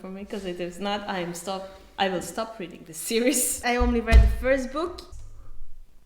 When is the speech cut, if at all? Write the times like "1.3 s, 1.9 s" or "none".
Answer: 3.6 s, 5.1 s